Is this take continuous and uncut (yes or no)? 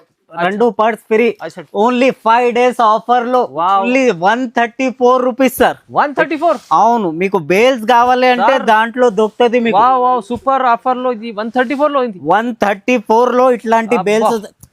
no